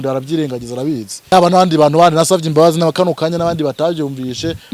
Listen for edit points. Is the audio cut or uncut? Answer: cut